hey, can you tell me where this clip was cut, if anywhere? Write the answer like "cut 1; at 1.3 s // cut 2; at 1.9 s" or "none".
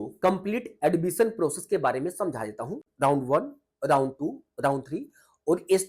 none